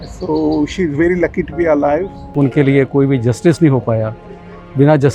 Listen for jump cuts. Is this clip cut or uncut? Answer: cut